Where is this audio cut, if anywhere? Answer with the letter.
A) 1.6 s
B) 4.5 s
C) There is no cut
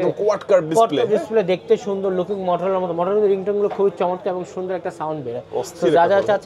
C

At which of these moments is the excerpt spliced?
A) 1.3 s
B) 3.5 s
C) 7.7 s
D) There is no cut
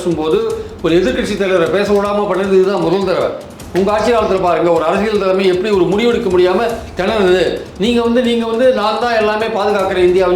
B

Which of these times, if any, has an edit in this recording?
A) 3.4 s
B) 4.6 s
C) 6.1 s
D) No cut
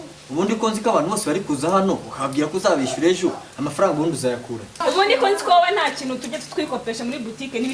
B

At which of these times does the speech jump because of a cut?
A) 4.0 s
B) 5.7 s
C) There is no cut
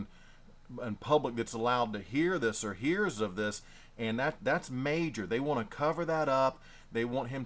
B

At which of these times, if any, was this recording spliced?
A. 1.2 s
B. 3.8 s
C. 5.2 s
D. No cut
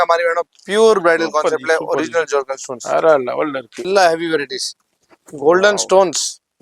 B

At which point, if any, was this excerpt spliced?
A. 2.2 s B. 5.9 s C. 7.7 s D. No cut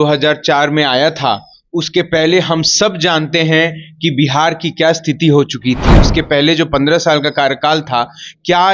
B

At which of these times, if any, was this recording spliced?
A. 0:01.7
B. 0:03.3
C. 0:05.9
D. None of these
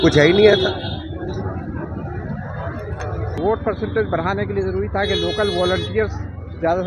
B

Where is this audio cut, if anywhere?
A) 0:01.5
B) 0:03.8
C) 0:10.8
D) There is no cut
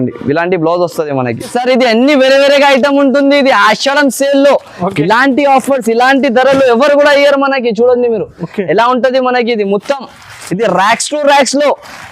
A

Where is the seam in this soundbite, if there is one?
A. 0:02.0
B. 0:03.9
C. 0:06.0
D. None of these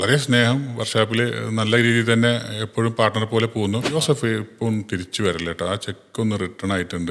B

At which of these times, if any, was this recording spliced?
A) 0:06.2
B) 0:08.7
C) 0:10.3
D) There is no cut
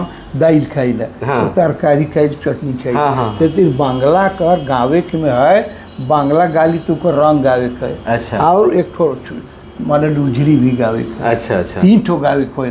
D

